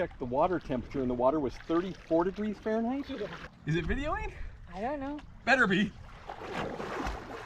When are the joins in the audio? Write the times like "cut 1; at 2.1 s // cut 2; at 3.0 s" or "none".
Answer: cut 1; at 3.4 s